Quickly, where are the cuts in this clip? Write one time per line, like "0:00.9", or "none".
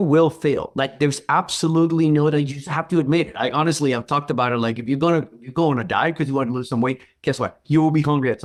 none